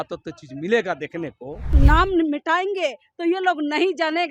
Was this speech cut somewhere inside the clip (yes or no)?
yes